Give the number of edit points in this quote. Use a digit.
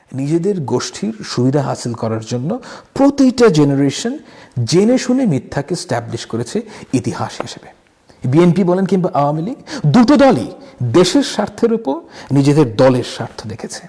0